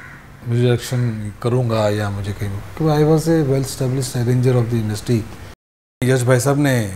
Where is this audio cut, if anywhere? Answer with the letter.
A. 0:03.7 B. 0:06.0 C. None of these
B